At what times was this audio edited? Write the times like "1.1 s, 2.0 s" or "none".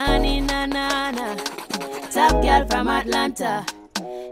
none

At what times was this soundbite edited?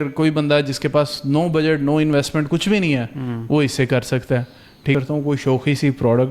4.9 s

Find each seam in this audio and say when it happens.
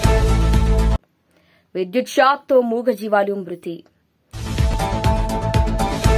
none

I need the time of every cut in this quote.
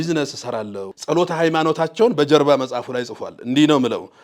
0.9 s

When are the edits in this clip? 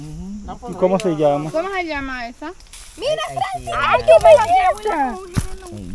2.8 s

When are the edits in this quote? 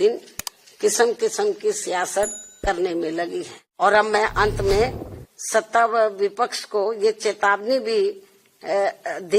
3.6 s

